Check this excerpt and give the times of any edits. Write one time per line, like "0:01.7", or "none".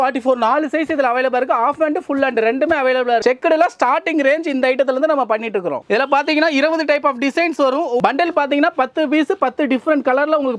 0:03.2
0:05.8
0:08.0